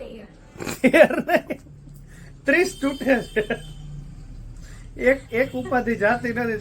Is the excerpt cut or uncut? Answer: cut